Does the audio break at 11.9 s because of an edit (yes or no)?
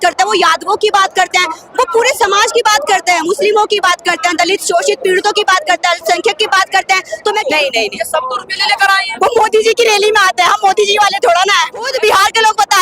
yes